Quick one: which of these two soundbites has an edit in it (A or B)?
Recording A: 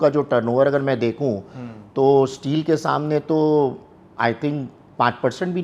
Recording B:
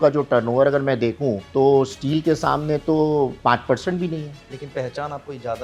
B